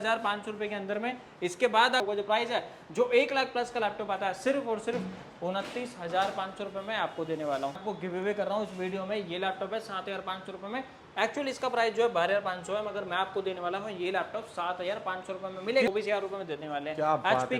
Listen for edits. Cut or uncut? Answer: cut